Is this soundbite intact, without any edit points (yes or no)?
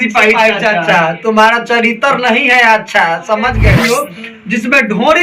no